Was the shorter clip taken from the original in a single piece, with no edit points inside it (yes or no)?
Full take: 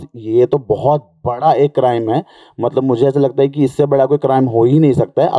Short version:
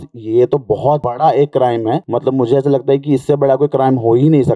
no